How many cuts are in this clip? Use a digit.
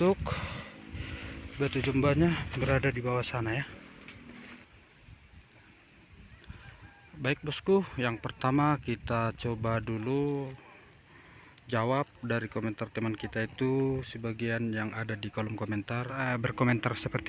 2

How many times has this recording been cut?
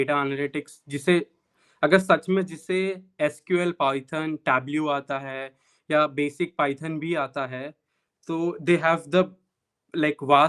0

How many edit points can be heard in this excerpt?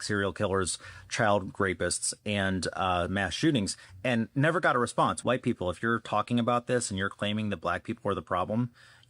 1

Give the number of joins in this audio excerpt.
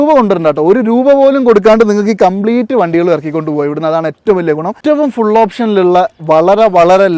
1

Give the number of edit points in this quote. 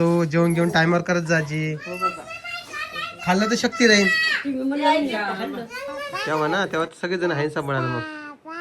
1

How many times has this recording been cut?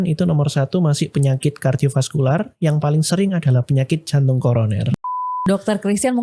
1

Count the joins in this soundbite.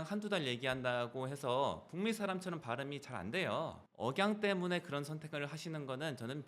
1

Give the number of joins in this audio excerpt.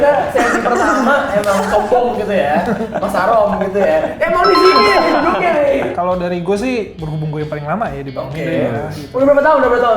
1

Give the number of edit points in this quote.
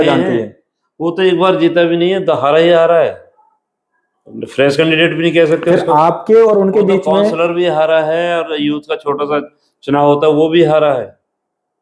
0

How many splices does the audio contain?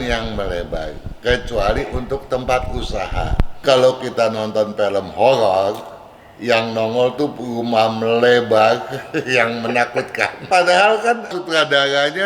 3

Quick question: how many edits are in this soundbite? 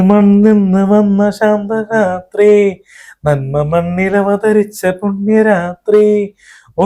0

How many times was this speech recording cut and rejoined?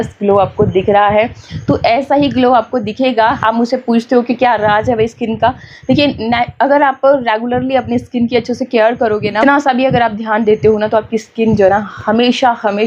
2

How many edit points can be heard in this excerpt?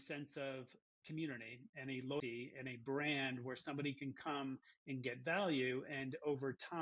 2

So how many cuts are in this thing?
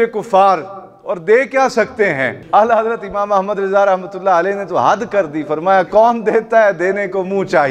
1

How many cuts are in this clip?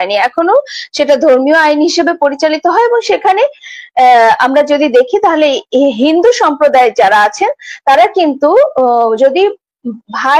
0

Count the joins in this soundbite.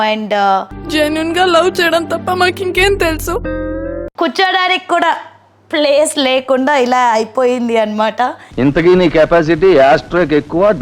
1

